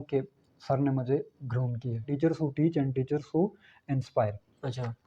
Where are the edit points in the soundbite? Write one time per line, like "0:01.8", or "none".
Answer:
0:02.1